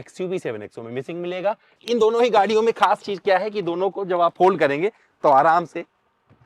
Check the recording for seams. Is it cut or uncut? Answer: cut